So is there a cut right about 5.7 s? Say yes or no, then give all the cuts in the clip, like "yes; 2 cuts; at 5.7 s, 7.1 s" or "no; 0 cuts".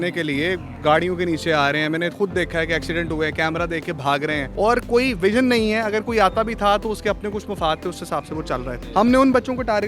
no; 2 cuts; at 4.5 s, 8.8 s